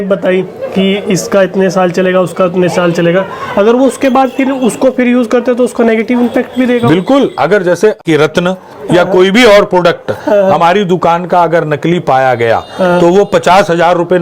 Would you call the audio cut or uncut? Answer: cut